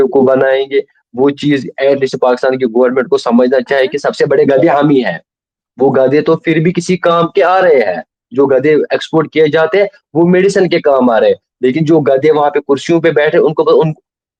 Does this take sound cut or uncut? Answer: uncut